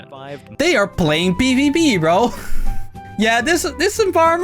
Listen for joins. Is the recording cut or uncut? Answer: cut